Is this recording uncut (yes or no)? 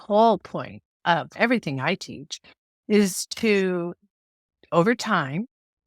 no